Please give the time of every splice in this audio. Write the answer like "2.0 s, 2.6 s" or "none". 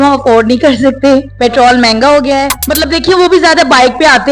1.3 s, 2.6 s